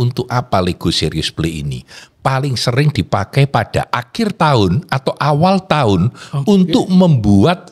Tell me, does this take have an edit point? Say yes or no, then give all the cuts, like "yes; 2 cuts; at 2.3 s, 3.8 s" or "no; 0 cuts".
no; 0 cuts